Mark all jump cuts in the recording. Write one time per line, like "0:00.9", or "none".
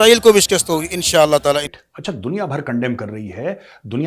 0:01.7